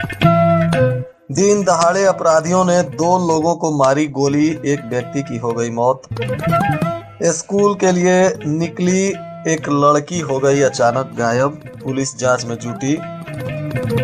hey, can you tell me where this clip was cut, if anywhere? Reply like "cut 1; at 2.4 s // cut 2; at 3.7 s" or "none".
cut 1; at 1.1 s